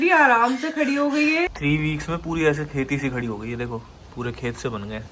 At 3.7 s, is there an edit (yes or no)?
no